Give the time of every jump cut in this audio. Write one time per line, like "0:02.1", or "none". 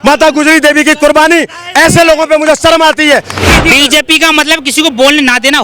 0:03.3